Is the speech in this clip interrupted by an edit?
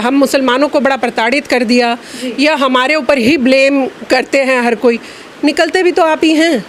no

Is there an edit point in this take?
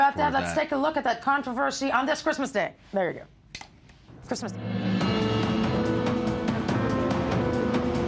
yes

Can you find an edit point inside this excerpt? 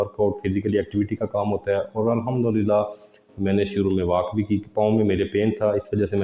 no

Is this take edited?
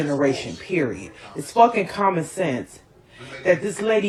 no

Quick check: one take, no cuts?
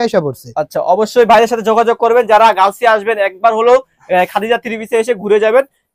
yes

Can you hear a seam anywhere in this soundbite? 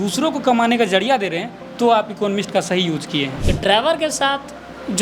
yes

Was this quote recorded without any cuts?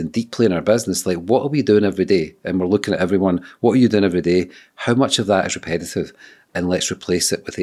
yes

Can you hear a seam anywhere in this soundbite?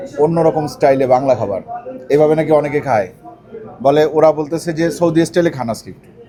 no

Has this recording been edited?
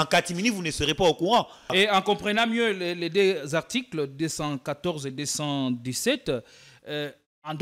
yes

